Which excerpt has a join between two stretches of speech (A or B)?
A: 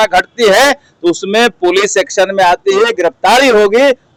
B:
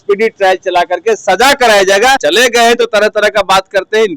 B